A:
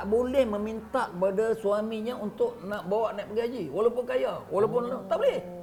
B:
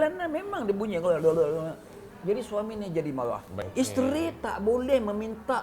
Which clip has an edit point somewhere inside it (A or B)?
B